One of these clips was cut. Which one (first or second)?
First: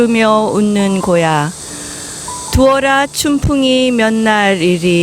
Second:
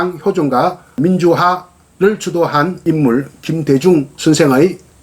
second